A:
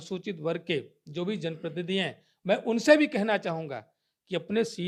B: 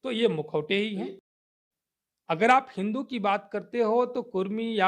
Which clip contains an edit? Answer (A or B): B